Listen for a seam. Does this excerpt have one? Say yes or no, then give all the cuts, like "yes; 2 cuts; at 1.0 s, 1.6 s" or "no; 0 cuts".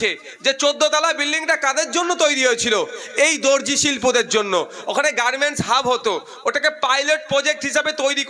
no; 0 cuts